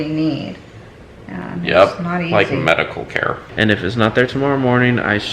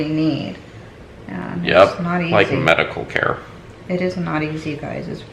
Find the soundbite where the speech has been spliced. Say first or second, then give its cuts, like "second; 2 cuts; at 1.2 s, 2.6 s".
first; 1 cut; at 3.4 s